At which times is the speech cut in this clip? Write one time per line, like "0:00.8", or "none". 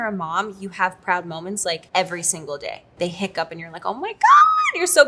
0:01.8
0:02.8